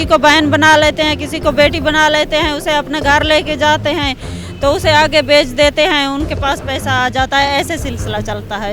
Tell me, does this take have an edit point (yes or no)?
no